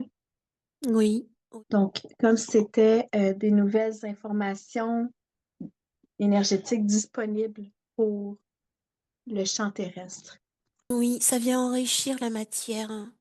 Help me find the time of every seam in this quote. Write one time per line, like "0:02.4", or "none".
0:01.4
0:10.9